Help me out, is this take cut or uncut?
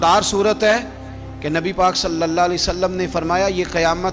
uncut